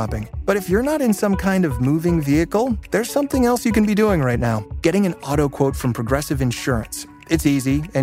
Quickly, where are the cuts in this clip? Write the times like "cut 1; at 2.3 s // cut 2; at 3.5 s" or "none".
none